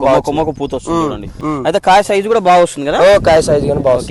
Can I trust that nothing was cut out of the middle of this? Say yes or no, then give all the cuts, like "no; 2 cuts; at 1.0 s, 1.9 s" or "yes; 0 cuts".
no; 1 cut; at 1.3 s